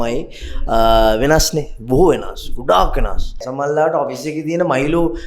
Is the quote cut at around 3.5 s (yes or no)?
yes